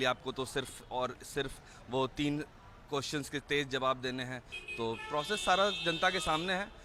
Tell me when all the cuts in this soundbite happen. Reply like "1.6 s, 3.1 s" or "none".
none